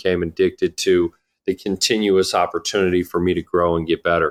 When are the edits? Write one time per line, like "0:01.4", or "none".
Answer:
none